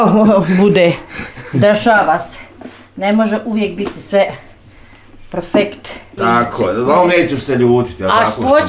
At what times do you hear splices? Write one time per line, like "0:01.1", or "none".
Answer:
0:06.1